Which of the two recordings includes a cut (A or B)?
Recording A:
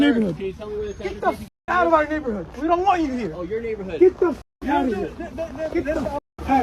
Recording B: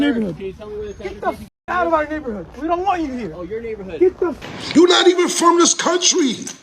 B